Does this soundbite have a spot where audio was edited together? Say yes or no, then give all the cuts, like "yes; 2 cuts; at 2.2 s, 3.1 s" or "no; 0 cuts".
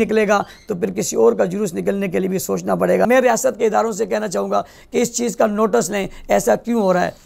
yes; 1 cut; at 3.1 s